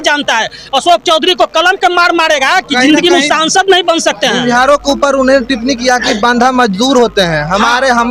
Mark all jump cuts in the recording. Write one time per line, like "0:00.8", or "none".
none